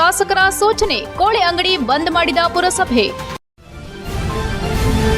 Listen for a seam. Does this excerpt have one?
yes; 1 cut; at 3.3 s

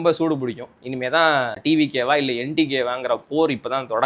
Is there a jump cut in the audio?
yes; 1 cut; at 1.6 s

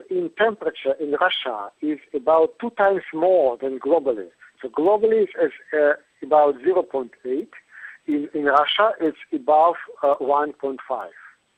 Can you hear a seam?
no; 0 cuts

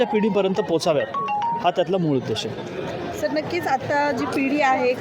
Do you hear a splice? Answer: no; 0 cuts

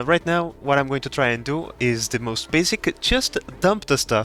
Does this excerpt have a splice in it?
no; 0 cuts

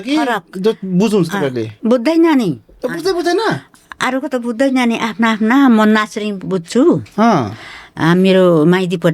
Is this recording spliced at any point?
yes; 1 cut; at 1.7 s

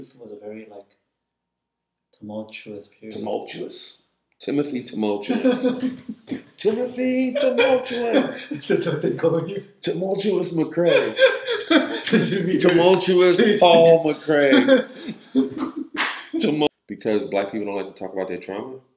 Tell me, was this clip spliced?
yes; 1 cut; at 16.7 s

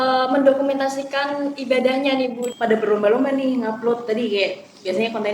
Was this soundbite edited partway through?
yes; 1 cut; at 2.5 s

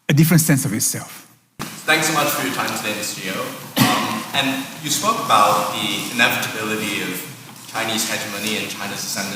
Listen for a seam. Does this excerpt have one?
yes; 1 cut; at 1.7 s

